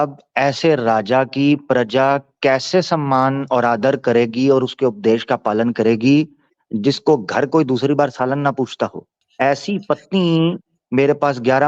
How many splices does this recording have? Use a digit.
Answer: 0